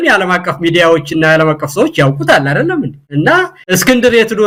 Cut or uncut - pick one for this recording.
uncut